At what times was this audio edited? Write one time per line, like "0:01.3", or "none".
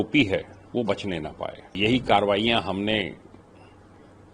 0:01.8

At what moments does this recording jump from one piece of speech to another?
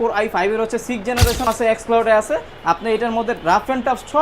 0:01.5

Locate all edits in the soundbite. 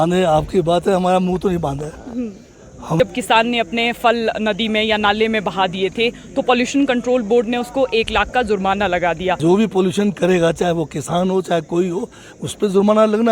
0:03.0
0:09.4

